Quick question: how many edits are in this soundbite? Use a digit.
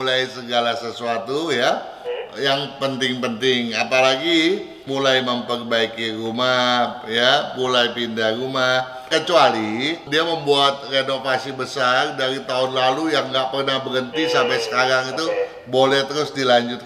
2